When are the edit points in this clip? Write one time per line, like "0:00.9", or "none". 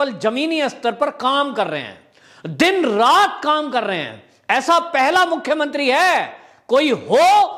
none